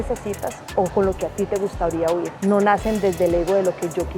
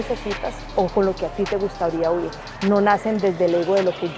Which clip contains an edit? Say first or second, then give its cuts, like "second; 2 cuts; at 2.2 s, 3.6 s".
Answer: first; 1 cut; at 2.3 s